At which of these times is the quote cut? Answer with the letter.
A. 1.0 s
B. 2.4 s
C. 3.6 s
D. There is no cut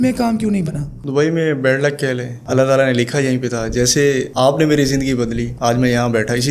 B